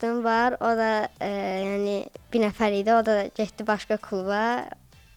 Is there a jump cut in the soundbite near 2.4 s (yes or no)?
no